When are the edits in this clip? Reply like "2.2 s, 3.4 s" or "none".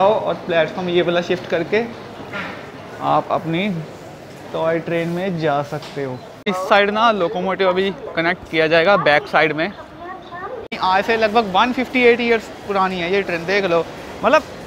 6.5 s, 10.7 s